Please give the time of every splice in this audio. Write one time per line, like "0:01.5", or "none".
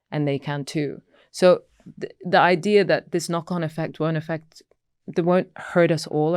none